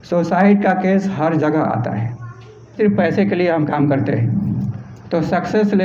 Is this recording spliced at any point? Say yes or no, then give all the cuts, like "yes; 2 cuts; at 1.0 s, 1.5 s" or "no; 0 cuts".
yes; 1 cut; at 2.8 s